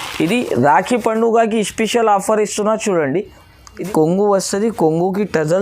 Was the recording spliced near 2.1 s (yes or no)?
no